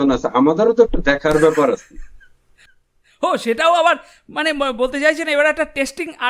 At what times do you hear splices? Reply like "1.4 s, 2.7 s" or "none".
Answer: none